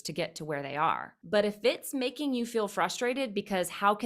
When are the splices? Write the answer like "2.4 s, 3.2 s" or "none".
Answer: 1.1 s